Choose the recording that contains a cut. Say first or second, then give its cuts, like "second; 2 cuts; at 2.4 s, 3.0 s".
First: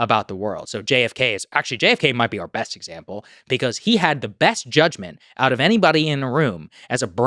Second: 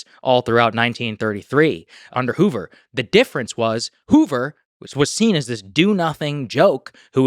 second; 1 cut; at 2.1 s